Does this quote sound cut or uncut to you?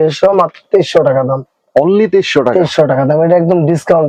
uncut